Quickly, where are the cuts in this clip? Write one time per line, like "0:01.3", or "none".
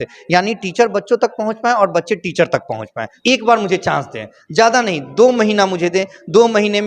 0:03.0

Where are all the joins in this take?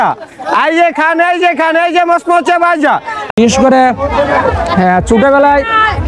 0:03.4

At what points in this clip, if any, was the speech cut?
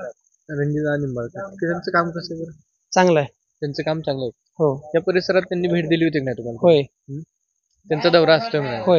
none

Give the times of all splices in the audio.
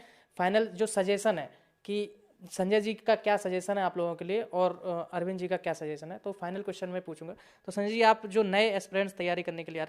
none

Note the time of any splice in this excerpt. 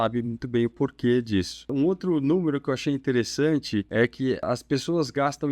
0:01.7
0:04.2

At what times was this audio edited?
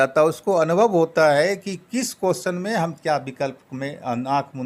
none

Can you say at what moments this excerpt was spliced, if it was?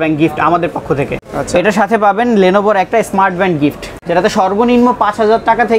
0:01.1
0:03.9

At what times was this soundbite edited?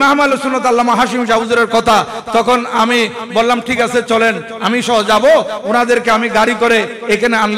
0:04.5

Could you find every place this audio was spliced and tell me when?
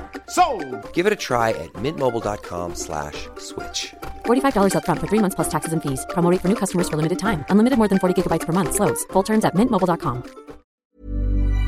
0:10.7

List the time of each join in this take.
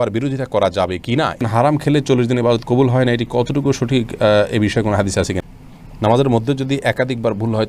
0:01.5
0:05.5

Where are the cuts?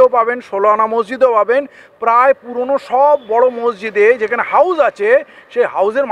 none

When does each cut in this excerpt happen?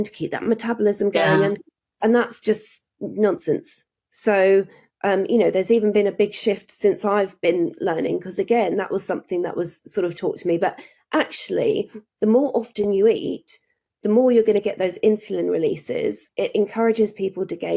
0:16.2

